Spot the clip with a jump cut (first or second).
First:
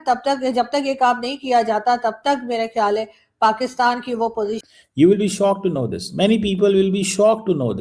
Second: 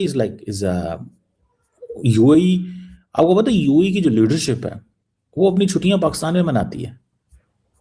first